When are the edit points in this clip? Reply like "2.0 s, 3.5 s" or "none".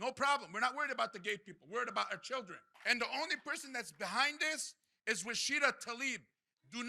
2.6 s